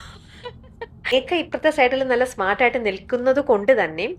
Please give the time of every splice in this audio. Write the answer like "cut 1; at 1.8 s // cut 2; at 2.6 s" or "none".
cut 1; at 1.1 s